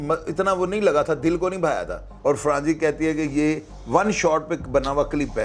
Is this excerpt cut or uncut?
cut